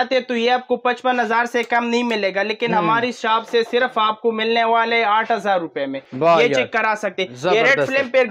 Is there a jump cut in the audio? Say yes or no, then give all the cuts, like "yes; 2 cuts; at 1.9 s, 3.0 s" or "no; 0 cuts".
no; 0 cuts